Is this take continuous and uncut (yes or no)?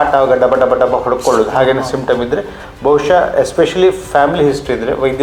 yes